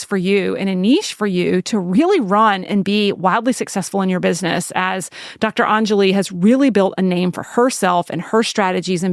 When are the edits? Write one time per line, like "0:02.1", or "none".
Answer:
none